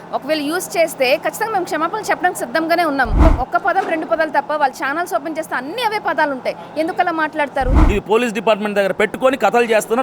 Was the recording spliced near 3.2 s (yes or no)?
yes